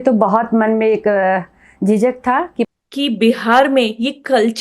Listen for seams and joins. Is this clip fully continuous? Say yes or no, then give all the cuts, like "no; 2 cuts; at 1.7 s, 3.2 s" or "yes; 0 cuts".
no; 1 cut; at 2.7 s